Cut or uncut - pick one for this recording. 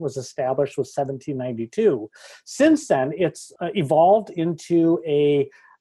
uncut